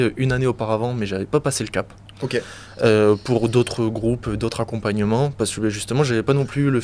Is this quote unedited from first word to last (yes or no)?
yes